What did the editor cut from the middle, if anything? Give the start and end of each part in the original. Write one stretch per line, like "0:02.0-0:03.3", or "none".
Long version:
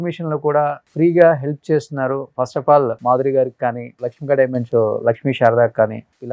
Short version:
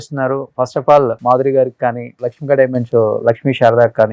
none